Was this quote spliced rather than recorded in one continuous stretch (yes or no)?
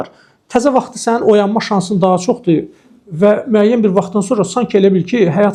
no